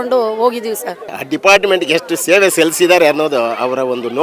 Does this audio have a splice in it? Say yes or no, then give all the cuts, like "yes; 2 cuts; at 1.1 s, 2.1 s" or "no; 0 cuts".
yes; 1 cut; at 1.2 s